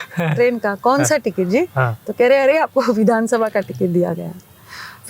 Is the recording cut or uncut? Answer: uncut